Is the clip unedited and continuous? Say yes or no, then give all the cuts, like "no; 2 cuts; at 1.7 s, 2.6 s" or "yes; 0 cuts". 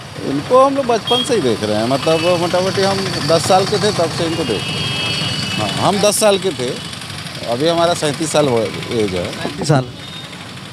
yes; 0 cuts